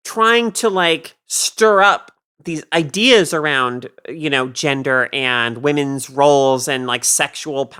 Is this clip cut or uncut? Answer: uncut